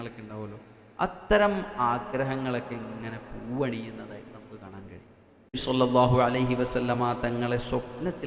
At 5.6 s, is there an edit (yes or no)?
yes